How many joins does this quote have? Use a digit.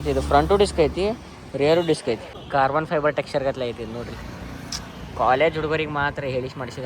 1